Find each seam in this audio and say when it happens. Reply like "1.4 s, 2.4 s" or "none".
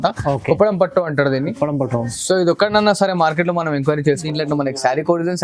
4.1 s